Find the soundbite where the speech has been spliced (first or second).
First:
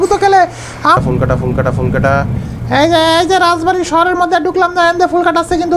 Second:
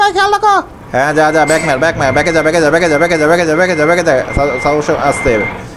first